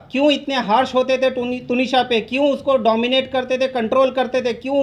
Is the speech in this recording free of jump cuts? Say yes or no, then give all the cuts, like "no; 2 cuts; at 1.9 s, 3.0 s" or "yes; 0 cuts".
yes; 0 cuts